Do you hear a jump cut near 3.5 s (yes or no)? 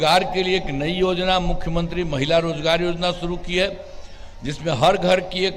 no